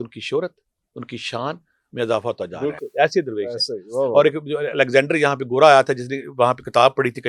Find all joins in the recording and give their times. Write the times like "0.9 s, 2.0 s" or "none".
none